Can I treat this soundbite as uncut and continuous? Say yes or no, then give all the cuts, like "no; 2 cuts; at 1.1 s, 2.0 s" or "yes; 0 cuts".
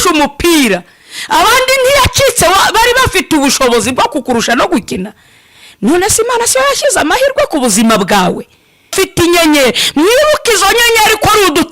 no; 1 cut; at 8.9 s